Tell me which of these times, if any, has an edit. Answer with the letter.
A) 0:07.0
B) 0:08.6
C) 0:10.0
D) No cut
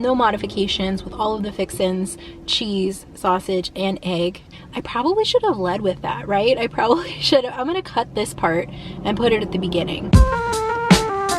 C